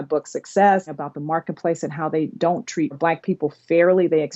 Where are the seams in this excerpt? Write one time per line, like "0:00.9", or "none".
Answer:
0:01.0
0:03.0

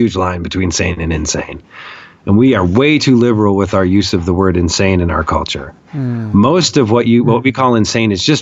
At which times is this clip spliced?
none

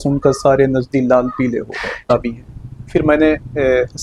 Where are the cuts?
0:02.1

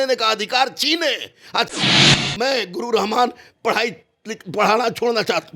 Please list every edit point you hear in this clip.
0:02.1

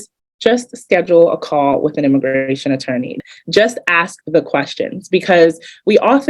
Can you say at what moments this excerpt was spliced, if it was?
0:03.1

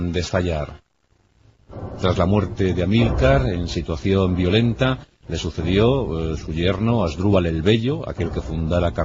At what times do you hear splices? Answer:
none

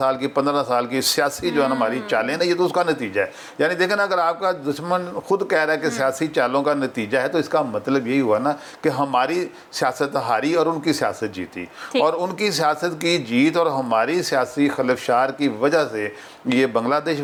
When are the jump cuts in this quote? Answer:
none

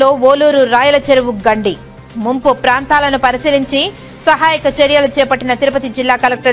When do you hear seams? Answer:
none

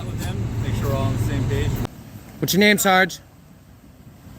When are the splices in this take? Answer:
0:01.8

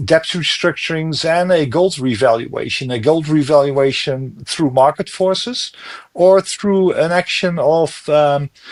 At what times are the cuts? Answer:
none

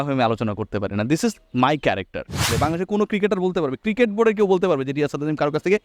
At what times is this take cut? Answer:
0:02.5

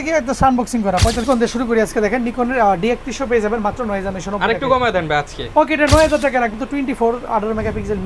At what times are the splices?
0:01.2
0:06.5

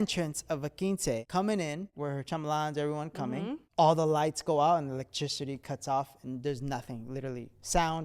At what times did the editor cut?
0:01.2
0:01.9
0:03.6

